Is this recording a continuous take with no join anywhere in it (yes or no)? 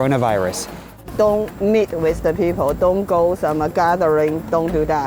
no